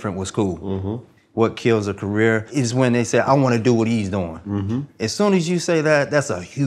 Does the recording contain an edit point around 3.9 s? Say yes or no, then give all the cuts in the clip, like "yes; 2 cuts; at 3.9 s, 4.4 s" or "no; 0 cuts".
no; 2 cuts; at 1.1 s, 2.5 s